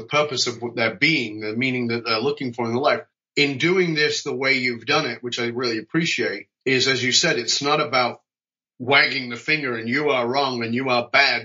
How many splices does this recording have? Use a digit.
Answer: 2